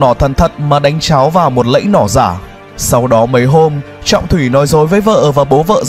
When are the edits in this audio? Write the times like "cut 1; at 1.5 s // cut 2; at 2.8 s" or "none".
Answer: none